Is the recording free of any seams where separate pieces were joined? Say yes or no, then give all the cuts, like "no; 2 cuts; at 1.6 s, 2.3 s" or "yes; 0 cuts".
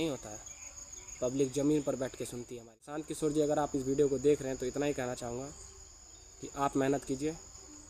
no; 1 cut; at 3.1 s